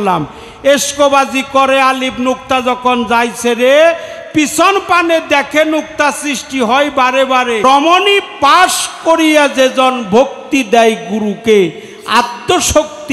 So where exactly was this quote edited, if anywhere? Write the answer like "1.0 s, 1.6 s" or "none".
7.6 s